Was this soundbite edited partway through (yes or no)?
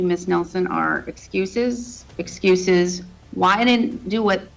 no